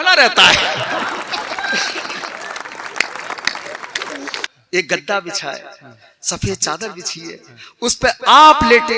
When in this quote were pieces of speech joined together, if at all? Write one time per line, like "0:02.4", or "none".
0:04.4